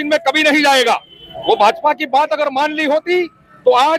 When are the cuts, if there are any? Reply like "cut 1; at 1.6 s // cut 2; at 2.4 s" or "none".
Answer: none